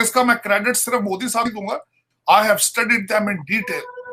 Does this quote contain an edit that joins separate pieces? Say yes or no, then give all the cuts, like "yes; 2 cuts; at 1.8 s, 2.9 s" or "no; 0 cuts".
yes; 1 cut; at 1.6 s